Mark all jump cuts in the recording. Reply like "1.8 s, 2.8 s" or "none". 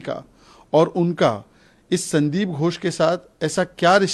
none

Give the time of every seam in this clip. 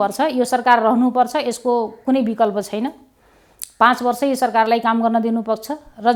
none

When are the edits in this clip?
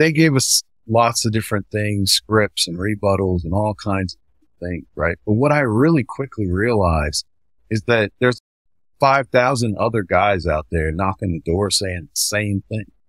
8.1 s

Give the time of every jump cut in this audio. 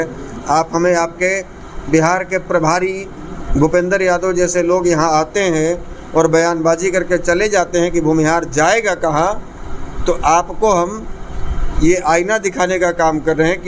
none

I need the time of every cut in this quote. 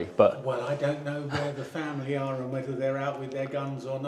none

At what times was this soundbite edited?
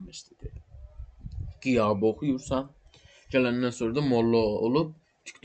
none

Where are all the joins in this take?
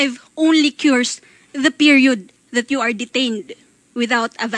none

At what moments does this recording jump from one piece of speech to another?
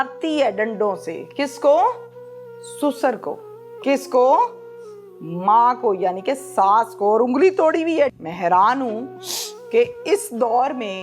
8.1 s

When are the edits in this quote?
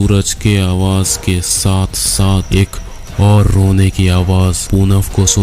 2.5 s, 4.6 s

